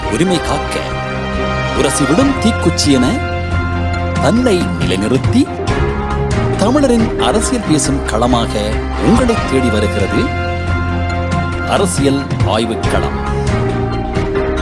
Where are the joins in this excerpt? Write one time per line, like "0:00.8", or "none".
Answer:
none